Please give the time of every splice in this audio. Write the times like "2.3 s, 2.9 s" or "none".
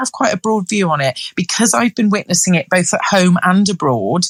none

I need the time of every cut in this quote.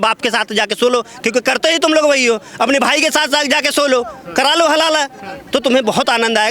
none

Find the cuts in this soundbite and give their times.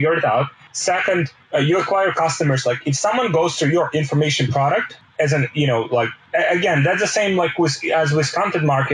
1.0 s, 5.0 s, 6.2 s

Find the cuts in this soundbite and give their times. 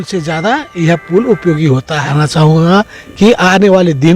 2.1 s

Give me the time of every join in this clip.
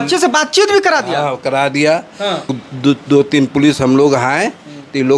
2.6 s

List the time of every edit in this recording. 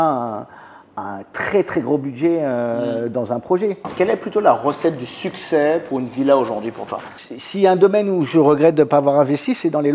3.9 s, 7.1 s

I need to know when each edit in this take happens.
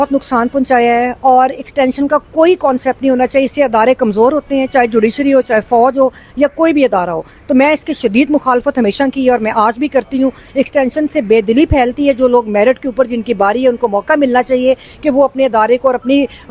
none

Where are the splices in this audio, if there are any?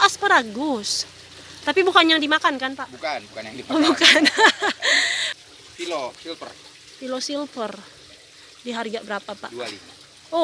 5.3 s

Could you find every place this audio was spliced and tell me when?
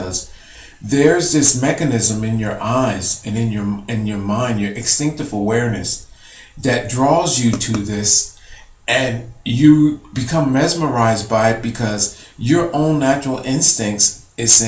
1.5 s

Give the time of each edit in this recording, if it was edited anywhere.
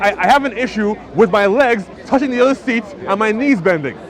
none

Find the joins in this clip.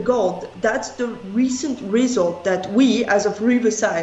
none

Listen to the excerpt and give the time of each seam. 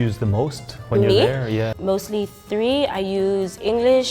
1.8 s

